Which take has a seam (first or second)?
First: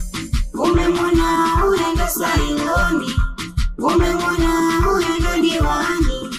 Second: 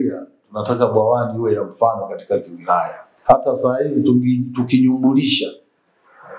second